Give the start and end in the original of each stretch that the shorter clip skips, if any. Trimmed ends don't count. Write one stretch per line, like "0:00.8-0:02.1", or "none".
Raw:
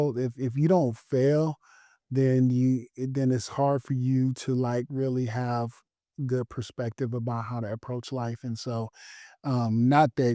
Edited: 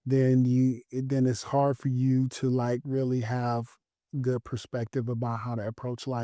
none